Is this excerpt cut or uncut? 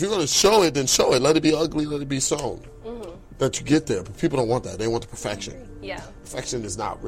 uncut